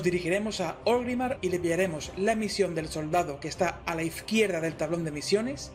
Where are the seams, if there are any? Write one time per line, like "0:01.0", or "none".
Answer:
0:00.9